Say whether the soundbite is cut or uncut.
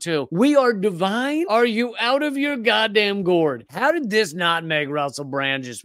cut